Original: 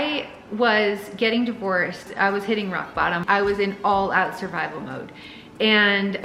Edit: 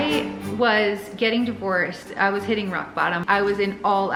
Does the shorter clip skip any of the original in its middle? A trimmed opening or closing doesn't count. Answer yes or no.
no